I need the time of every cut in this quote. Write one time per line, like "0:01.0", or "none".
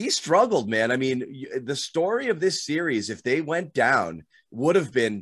none